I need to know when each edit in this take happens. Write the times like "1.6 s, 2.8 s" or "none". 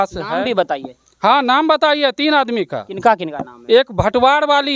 none